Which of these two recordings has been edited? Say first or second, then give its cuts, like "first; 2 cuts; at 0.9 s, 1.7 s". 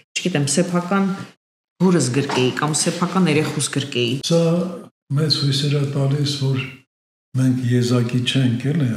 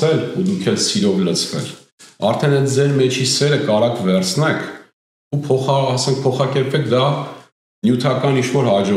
first; 1 cut; at 4.2 s